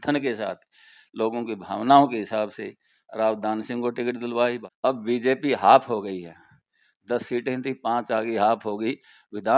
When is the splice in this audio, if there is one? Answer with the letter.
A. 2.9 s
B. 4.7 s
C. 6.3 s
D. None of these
B